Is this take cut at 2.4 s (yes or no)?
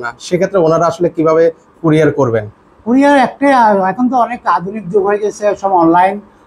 no